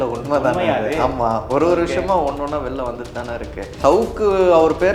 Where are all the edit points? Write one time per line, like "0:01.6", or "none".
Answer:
0:03.7